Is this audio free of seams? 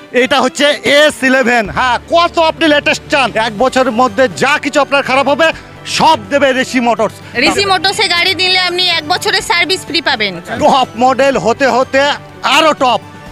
no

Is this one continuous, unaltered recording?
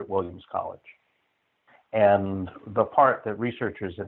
yes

